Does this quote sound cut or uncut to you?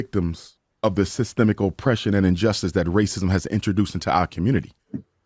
uncut